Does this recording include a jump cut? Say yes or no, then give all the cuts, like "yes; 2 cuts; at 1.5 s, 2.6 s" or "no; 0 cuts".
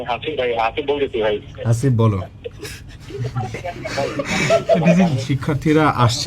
yes; 1 cut; at 5.3 s